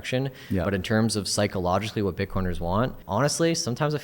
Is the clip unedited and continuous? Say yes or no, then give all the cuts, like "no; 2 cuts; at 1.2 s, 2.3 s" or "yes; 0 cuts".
no; 1 cut; at 3.0 s